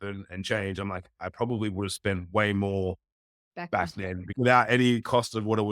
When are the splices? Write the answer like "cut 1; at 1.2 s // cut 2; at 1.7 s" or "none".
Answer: cut 1; at 4.3 s

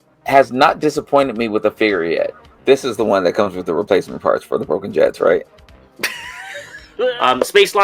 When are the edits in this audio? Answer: cut 1; at 2.5 s // cut 2; at 6.8 s

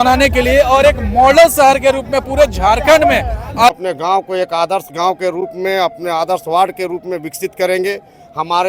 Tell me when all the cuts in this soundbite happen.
cut 1; at 3.7 s

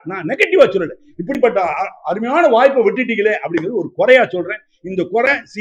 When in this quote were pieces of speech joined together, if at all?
none

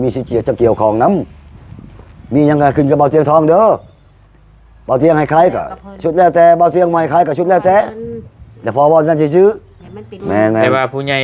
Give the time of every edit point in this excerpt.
cut 1; at 10.1 s

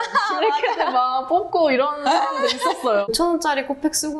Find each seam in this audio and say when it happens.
cut 1; at 3.1 s

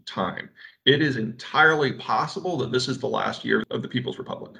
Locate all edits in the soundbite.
cut 1; at 3.7 s

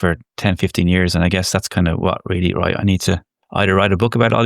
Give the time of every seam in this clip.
cut 1; at 3.4 s

